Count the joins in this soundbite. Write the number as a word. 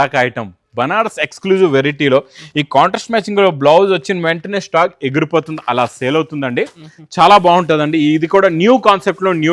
zero